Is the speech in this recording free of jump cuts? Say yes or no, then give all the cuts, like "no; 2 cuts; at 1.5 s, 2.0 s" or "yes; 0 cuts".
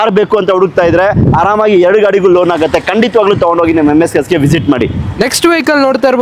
yes; 0 cuts